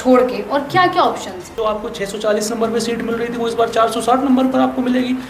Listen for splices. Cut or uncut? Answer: cut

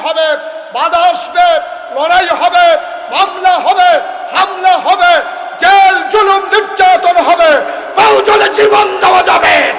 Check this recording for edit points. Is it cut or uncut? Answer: uncut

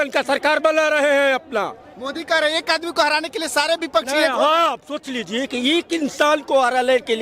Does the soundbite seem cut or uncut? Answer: uncut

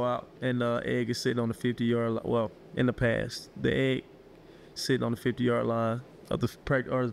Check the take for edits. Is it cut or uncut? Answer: cut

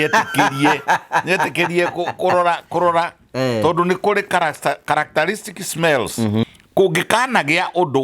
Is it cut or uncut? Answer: cut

